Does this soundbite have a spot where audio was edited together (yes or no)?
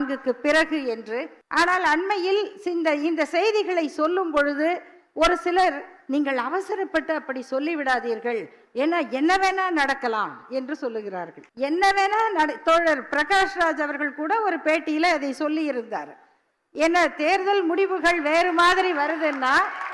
yes